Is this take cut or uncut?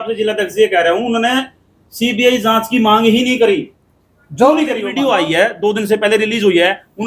cut